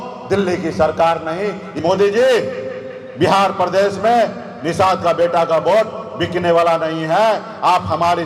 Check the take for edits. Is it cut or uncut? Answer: cut